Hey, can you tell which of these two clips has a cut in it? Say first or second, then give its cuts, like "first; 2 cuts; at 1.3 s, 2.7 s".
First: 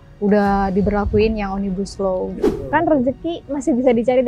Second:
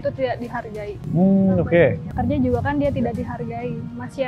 first; 1 cut; at 2.4 s